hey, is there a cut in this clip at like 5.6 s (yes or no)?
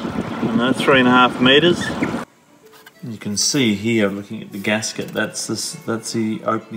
no